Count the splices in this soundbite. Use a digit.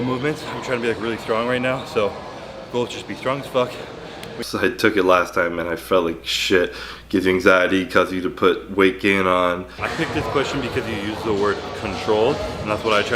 2